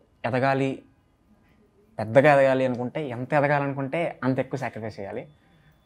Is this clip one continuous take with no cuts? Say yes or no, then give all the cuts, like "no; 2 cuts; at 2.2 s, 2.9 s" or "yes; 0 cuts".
yes; 0 cuts